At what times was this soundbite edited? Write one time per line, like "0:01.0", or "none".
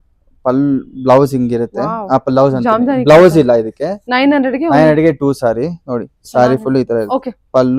none

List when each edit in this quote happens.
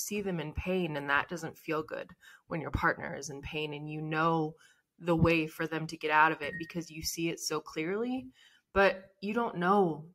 none

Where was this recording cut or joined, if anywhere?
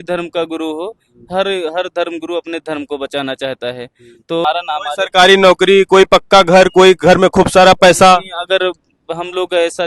0:04.4

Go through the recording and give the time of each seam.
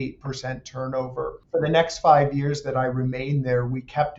0:01.4

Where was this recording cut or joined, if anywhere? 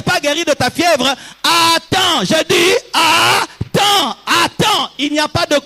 none

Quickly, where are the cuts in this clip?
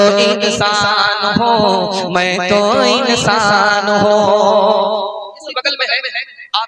0:05.4

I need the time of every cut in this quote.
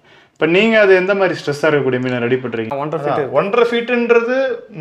0:02.6

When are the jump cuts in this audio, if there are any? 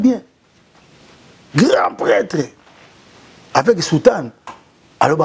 none

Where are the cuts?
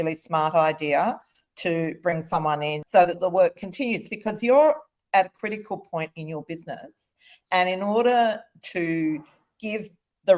0:02.8

